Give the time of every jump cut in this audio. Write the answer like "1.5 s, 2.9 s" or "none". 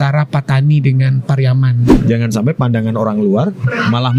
1.8 s